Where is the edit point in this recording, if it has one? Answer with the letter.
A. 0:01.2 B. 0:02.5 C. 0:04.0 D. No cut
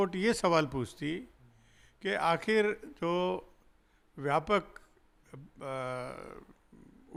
D